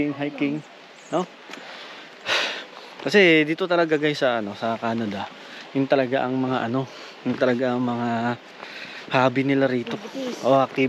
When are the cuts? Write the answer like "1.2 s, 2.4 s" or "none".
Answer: none